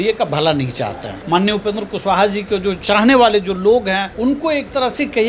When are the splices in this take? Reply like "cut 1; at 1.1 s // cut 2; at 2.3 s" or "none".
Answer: cut 1; at 1.1 s // cut 2; at 4.1 s